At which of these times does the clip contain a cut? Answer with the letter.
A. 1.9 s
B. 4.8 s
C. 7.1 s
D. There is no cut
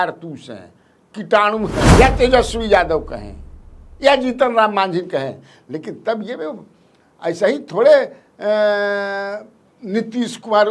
A